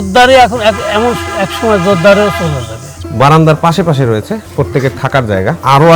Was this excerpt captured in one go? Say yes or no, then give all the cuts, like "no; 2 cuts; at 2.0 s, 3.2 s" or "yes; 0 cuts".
no; 1 cut; at 3.0 s